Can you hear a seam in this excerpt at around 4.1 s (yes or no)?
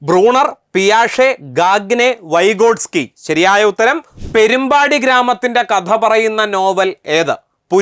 yes